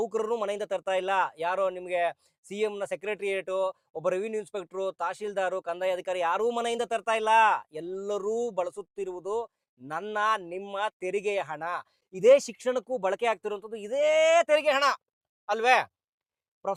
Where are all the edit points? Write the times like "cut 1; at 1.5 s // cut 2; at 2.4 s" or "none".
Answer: none